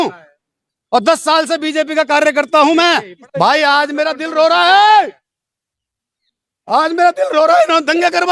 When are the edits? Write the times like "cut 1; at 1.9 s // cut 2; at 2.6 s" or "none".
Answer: cut 1; at 3.2 s